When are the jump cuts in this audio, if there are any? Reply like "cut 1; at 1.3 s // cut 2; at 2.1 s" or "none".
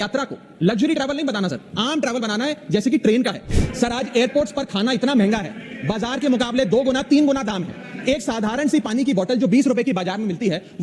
cut 1; at 3.5 s